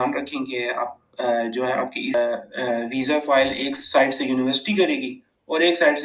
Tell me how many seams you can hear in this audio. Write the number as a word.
one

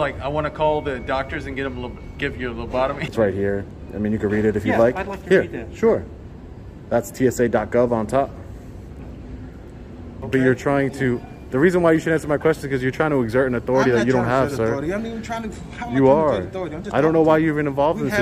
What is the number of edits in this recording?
two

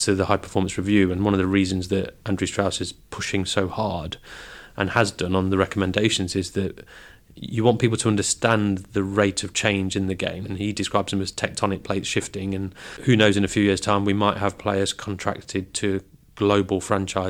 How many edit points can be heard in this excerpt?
two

